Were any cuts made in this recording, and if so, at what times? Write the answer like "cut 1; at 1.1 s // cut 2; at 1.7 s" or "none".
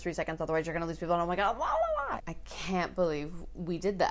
cut 1; at 2.2 s